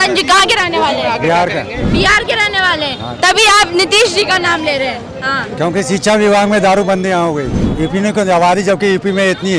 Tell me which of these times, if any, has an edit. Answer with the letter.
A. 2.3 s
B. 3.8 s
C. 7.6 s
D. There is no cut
C